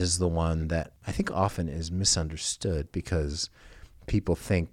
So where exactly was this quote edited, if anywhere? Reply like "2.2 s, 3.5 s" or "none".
1.0 s